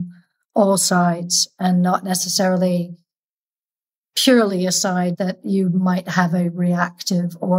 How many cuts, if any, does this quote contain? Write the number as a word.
one